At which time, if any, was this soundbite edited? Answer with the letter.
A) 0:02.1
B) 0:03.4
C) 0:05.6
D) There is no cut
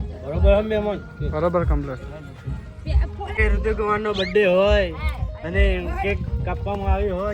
B